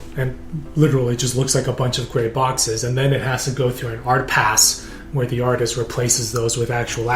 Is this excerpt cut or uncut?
uncut